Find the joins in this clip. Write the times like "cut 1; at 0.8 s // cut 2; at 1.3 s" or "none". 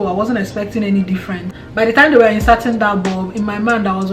cut 1; at 1.7 s